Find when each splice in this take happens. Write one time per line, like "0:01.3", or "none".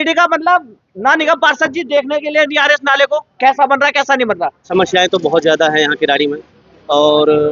0:04.6